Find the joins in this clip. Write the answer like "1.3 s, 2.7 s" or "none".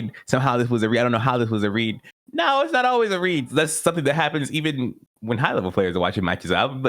3.5 s